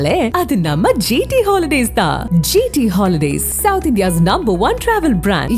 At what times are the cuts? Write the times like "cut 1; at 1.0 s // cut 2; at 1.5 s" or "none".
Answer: none